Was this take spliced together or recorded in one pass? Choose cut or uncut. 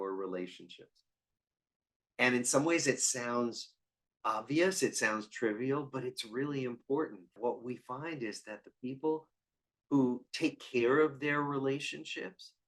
cut